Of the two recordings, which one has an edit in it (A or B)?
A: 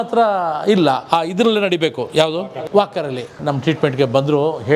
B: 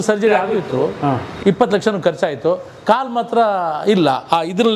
A